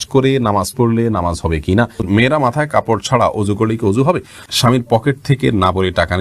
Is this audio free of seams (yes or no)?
no